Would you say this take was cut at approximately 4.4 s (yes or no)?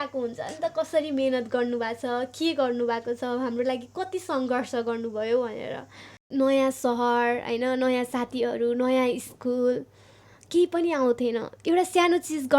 no